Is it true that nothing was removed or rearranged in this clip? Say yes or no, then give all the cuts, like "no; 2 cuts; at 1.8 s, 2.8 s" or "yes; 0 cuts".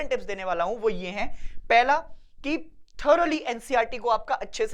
yes; 0 cuts